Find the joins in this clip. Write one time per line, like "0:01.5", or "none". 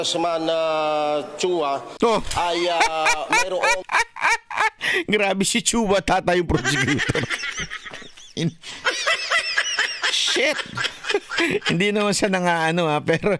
none